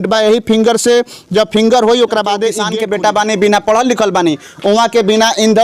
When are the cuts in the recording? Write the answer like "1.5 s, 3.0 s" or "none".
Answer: 2.6 s